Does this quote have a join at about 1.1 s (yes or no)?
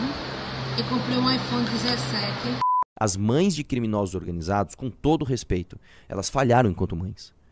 no